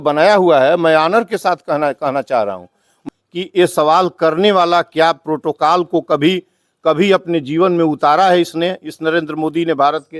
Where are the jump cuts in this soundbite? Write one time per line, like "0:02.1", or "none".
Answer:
0:02.9